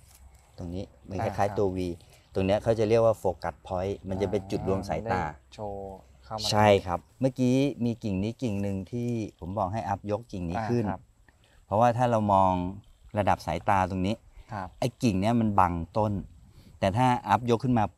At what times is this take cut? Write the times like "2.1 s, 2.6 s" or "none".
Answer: 7.1 s